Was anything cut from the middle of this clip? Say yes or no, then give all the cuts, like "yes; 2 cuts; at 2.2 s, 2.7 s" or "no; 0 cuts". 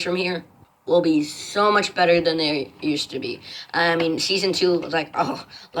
no; 0 cuts